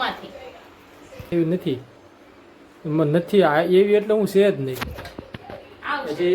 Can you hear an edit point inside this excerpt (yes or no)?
yes